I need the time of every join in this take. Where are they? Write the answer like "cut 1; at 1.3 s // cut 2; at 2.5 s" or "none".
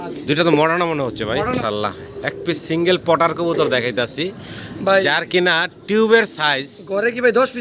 cut 1; at 1.6 s